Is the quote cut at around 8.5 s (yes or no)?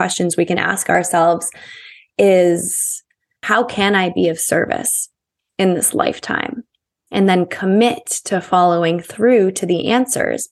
no